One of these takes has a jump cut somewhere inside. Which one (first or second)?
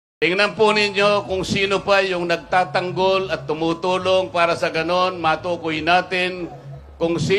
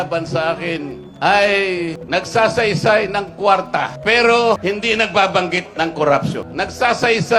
second